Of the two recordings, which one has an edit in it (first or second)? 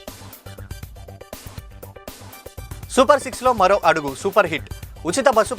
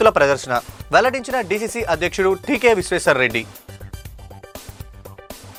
first